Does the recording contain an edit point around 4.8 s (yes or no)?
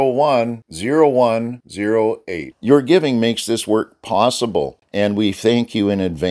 yes